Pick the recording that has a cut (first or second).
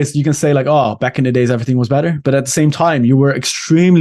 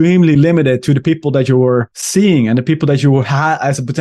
second